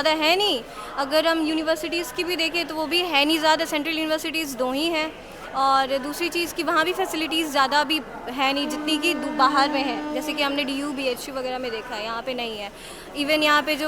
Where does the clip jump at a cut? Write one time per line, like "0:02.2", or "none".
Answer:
none